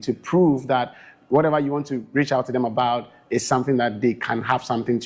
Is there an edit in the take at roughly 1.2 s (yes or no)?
no